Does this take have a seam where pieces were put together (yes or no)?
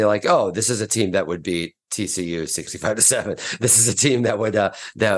yes